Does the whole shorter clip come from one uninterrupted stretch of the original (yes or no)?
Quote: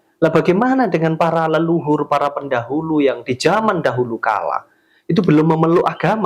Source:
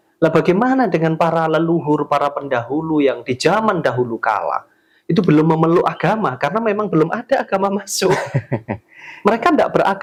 yes